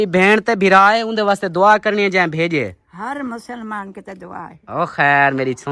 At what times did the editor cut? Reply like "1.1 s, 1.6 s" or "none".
none